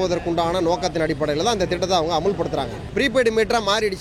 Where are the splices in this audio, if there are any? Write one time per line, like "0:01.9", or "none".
0:02.8